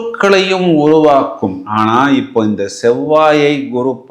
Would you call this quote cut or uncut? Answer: uncut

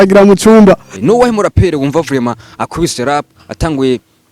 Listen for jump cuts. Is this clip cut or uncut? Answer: cut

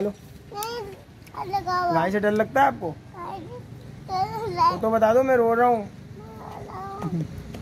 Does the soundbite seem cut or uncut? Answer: uncut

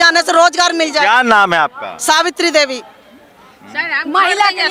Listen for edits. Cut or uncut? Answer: uncut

